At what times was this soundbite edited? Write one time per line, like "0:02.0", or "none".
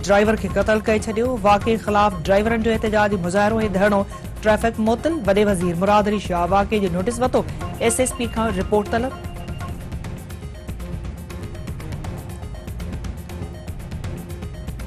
none